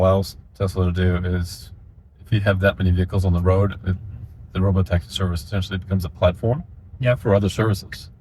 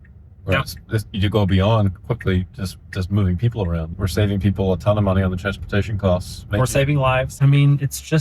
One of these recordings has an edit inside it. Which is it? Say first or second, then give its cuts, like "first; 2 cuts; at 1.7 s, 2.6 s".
second; 2 cuts; at 3.9 s, 7.3 s